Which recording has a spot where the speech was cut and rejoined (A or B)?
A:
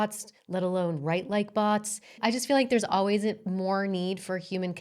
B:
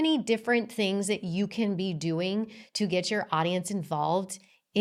A